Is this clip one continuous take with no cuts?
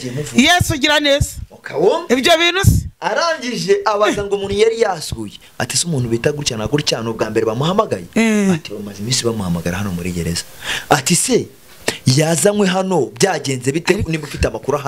yes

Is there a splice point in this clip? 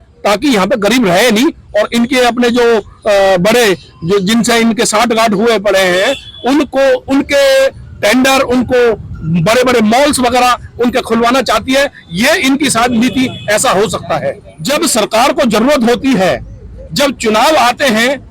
yes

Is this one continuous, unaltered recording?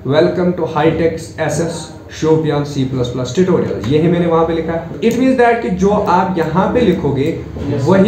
yes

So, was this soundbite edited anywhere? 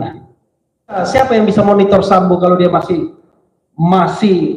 yes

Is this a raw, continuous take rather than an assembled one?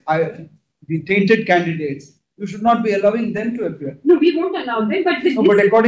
yes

